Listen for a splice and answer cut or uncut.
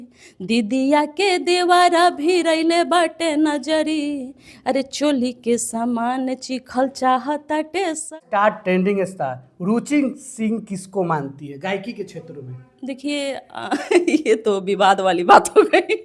cut